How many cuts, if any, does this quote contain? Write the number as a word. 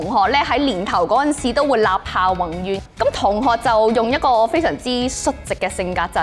one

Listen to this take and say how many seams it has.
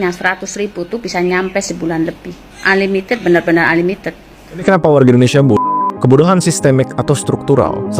one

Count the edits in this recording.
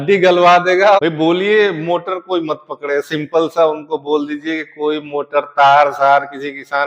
one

